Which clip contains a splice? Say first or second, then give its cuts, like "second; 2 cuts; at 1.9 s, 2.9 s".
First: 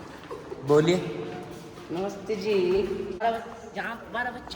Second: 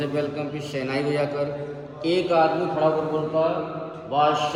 first; 1 cut; at 3.2 s